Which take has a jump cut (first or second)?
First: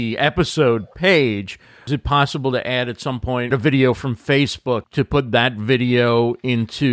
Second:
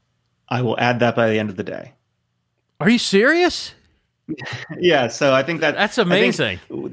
first